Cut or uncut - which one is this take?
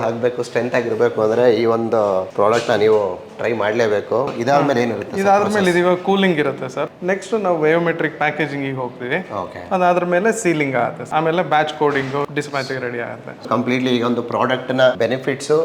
uncut